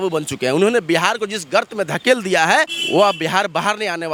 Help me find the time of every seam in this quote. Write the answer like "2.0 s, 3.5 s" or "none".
none

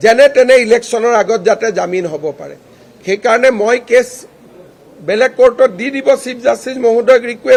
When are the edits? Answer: none

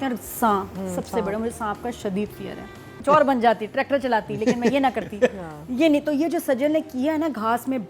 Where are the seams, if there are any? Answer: 2.9 s

